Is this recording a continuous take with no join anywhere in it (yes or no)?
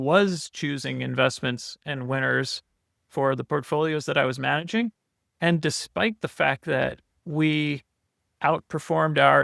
no